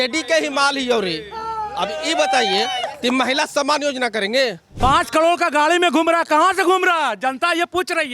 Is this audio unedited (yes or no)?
no